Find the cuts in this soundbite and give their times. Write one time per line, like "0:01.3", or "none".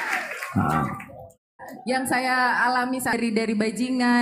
0:03.1